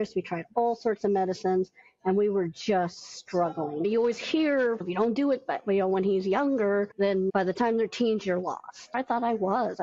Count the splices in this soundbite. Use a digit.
4